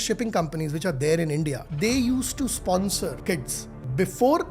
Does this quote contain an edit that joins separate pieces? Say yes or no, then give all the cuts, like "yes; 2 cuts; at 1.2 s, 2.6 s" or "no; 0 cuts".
yes; 2 cuts; at 1.6 s, 3.6 s